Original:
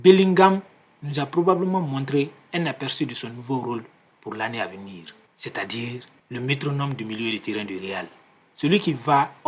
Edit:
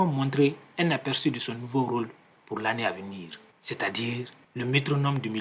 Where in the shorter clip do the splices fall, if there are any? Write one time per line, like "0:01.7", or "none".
none

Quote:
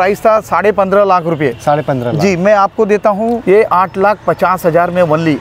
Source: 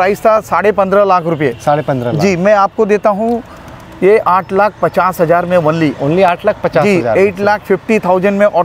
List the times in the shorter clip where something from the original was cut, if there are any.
0:03.4

